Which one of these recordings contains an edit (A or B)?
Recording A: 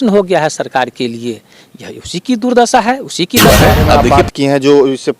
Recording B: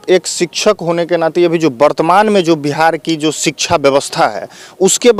A